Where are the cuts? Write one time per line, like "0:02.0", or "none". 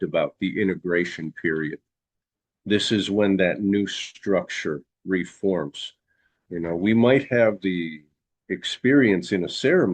none